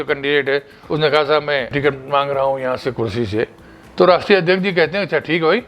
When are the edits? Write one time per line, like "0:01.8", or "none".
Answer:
0:01.7